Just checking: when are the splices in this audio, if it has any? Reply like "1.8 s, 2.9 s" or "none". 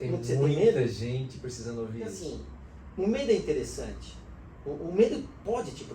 2.2 s